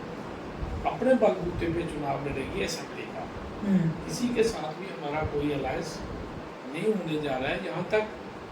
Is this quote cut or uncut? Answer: uncut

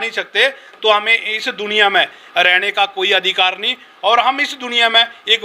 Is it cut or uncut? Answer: uncut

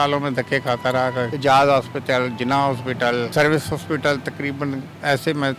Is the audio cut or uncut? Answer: cut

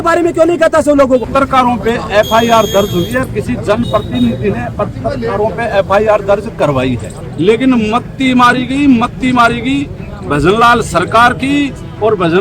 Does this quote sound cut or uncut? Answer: cut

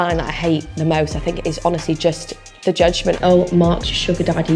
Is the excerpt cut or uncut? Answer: cut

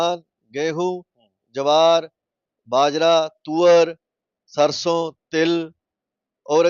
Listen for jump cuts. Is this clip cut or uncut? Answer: uncut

